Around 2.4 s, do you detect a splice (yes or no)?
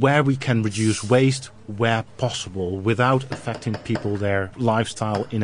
no